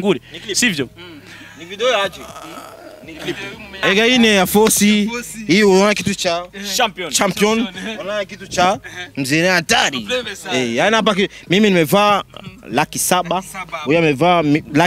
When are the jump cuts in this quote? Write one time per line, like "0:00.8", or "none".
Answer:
0:03.8